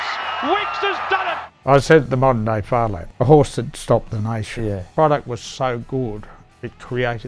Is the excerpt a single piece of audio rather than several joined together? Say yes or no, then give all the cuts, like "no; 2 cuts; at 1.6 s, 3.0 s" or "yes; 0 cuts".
no; 3 cuts; at 1.5 s, 3.0 s, 4.8 s